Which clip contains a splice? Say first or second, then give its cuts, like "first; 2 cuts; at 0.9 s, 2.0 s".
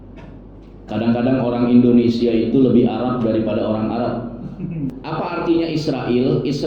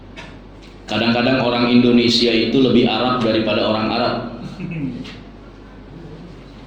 first; 1 cut; at 5.0 s